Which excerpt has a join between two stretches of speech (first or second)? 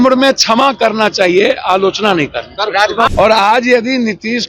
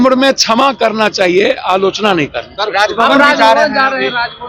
first